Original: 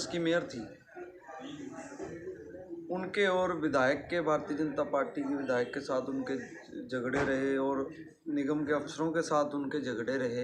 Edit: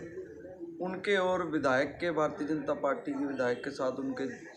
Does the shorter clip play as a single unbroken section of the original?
yes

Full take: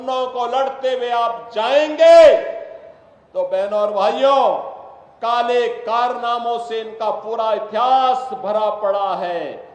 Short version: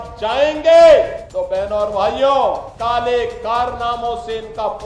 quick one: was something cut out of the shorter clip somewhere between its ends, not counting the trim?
yes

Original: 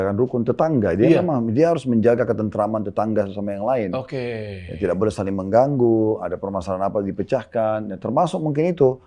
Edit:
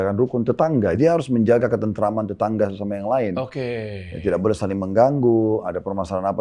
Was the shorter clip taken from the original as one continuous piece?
no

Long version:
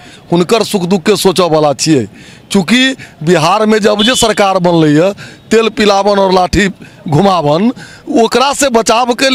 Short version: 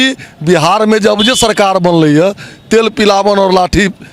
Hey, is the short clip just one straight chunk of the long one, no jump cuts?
yes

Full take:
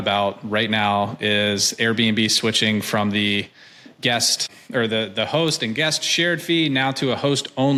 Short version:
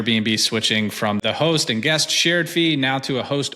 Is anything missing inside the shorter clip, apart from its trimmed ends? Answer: yes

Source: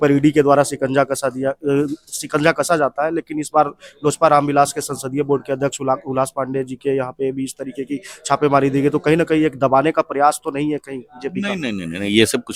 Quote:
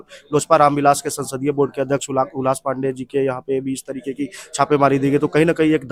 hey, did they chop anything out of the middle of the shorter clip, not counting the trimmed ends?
no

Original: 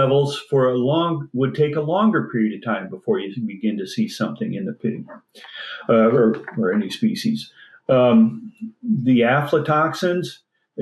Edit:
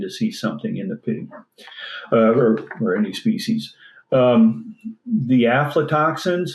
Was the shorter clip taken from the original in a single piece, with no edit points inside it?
yes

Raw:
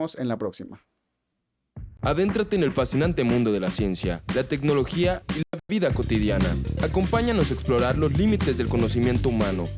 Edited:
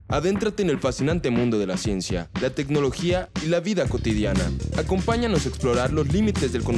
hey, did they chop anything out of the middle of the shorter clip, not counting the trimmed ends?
yes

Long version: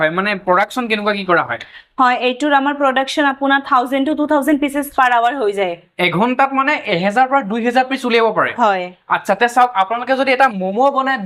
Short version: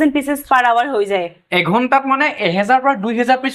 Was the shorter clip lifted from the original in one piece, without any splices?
yes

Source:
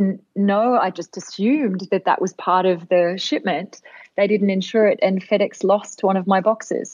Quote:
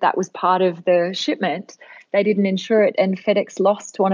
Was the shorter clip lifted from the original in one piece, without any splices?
yes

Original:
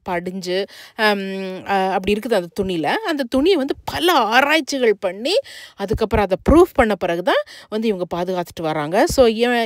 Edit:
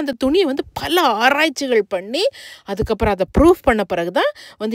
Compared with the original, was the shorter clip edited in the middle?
no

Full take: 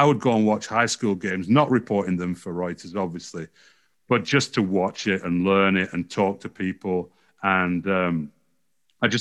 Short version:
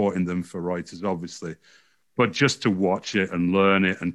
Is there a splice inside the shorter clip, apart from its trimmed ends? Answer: no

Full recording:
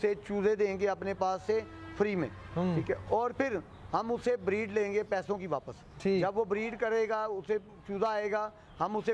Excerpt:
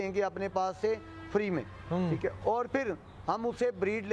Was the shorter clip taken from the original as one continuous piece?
yes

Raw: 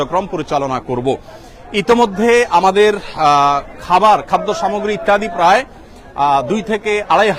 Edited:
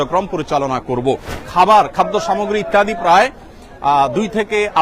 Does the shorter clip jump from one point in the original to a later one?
yes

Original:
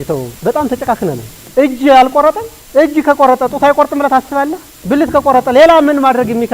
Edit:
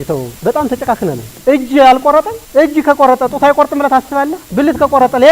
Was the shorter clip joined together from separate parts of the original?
yes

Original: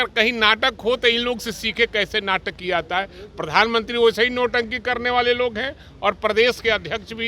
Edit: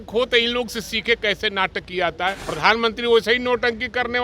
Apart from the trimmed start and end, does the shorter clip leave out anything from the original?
yes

